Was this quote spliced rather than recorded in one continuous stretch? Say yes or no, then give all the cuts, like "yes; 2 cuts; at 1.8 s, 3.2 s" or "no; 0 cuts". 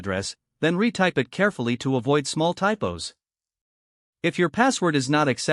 no; 0 cuts